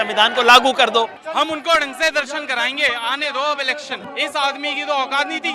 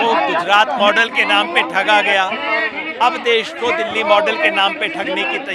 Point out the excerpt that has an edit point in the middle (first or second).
first